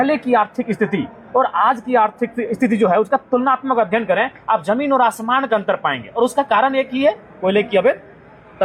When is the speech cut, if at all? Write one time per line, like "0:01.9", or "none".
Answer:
none